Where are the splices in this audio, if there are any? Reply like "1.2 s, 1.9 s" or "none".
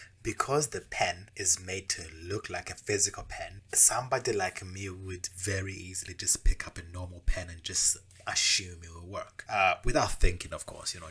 0.9 s, 3.7 s, 9.4 s

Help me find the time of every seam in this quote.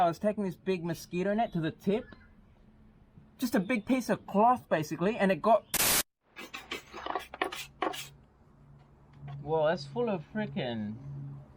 5.8 s

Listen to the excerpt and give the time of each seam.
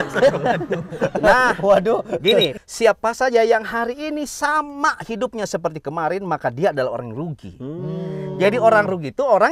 2.5 s

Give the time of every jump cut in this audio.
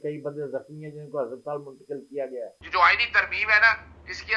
2.6 s

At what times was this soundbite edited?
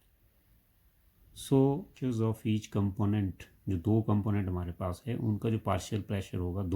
1.9 s

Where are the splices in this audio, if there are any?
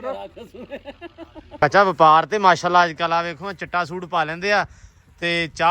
1.6 s

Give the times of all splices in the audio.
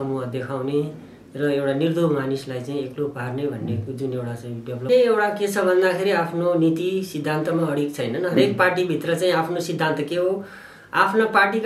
4.8 s

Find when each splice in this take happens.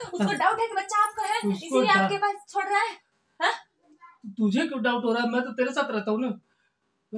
none

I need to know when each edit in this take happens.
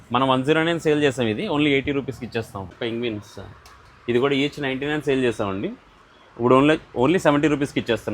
2.8 s

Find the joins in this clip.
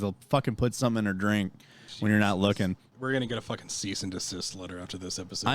2.9 s

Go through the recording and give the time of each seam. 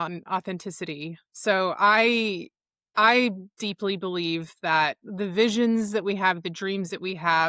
none

